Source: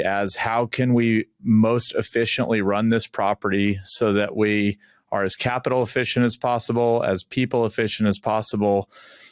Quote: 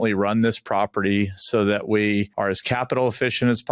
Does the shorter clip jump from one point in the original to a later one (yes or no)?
yes